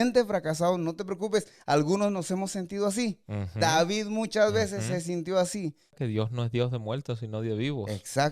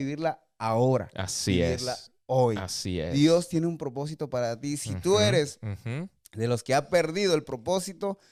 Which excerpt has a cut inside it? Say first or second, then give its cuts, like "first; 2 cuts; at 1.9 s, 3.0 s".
first; 1 cut; at 6.0 s